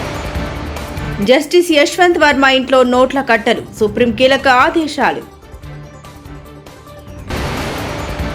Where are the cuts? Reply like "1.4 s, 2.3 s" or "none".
1.1 s